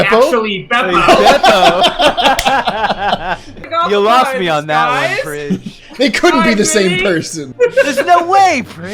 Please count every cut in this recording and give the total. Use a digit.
2